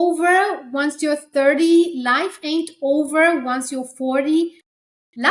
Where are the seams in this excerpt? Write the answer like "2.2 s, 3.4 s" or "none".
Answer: none